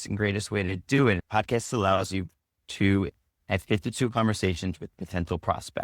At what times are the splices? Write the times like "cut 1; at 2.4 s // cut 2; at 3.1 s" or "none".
cut 1; at 1.2 s // cut 2; at 3.2 s